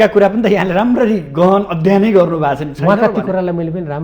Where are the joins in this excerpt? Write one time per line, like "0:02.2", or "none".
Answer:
none